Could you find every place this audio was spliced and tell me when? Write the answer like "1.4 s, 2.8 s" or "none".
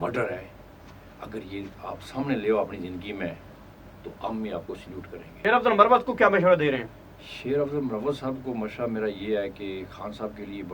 5.3 s

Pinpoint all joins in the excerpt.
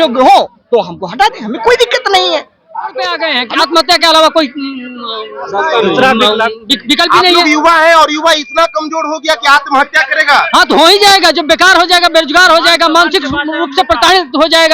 3.3 s

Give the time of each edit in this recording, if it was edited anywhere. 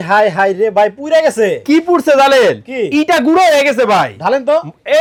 none

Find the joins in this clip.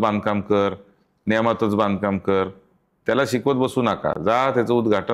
none

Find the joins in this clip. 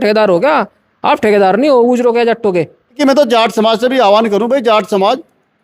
3.0 s

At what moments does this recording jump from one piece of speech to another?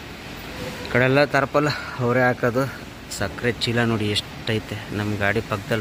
none

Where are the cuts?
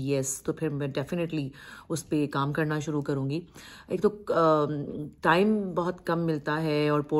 none

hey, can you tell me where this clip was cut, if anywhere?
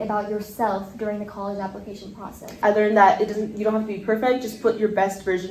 2.6 s

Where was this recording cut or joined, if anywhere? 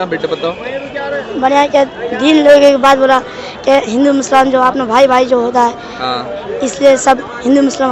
none

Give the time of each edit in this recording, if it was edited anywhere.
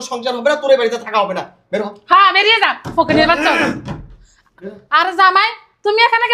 none

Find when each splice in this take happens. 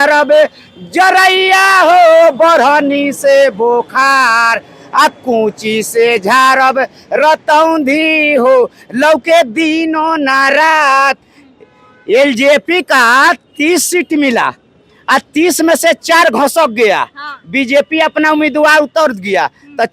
none

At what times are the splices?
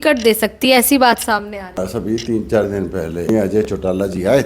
1.8 s, 3.3 s

